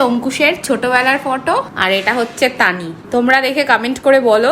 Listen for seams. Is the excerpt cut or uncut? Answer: cut